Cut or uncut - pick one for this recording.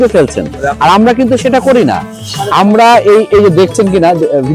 uncut